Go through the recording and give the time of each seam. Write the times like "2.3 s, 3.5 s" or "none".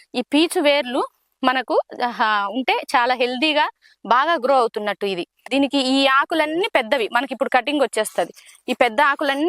5.4 s

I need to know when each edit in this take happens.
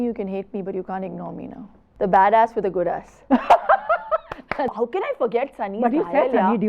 1.8 s, 4.7 s

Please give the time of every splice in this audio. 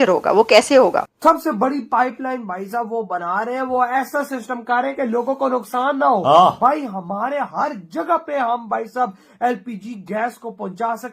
1.1 s

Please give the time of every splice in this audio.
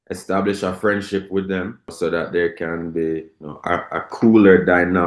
1.9 s, 3.5 s

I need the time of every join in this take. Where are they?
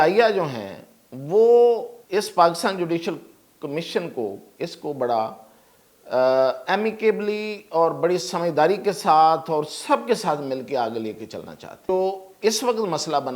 1.9 s, 4.5 s, 11.9 s

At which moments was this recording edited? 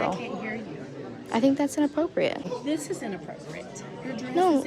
2.5 s

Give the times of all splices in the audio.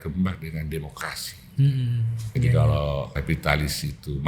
2.2 s, 3.1 s

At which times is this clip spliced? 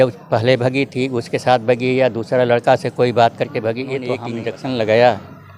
4.2 s

